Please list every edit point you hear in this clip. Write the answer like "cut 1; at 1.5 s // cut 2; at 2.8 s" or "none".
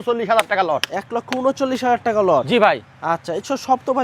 none